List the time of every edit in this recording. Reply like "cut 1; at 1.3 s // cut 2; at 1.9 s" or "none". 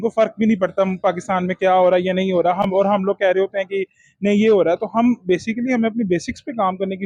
none

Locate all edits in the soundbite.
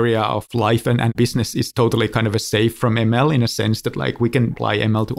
cut 1; at 2.8 s

